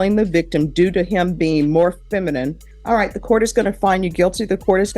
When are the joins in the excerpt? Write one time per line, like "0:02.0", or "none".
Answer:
0:02.7